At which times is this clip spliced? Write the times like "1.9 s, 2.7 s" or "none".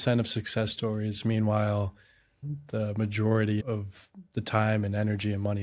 2.4 s, 3.6 s